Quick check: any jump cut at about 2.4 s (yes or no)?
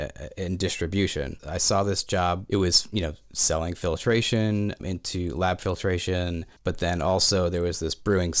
yes